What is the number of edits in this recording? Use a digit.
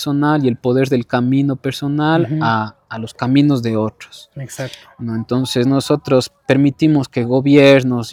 0